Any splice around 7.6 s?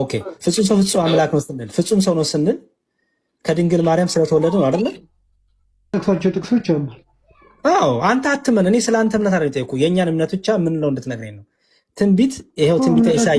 no; 1 cut; at 5.9 s

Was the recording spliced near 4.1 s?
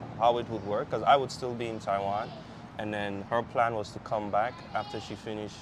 no; 0 cuts

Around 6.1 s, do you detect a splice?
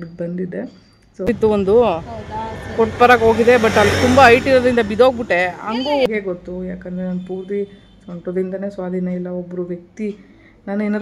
yes; 2 cuts; at 1.3 s, 6.1 s

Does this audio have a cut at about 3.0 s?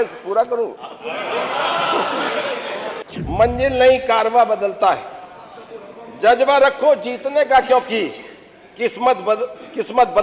yes; 1 cut; at 3.0 s

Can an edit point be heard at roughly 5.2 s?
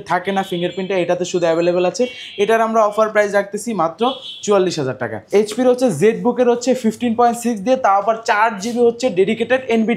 yes; 1 cut; at 5.2 s

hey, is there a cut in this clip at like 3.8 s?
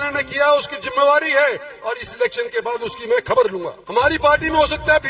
yes; 1 cut; at 3.8 s

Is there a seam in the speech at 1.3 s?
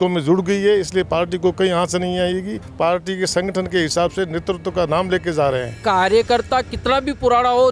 no; 2 cuts; at 2.6 s, 5.7 s

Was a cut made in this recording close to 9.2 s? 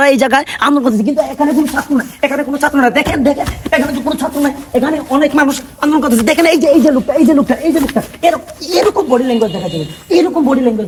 no; 0 cuts

